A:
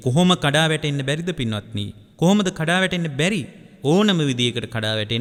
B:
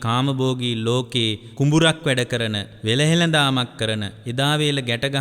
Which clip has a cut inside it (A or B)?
B